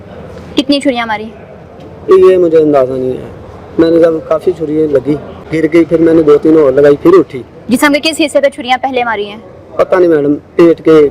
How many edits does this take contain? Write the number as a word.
one